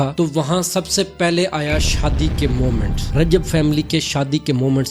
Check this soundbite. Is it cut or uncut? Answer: uncut